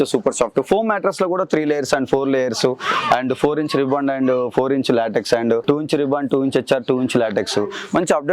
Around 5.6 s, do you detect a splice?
yes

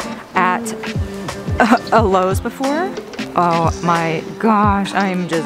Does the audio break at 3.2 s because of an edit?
yes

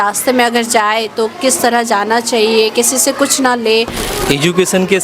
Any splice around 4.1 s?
yes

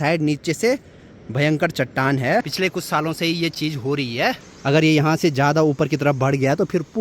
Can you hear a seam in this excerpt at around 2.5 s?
yes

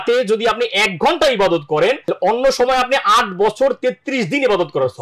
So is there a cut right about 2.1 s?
yes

